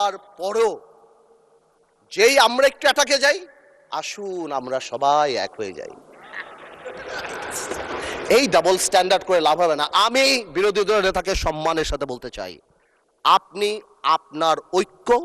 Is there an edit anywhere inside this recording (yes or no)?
no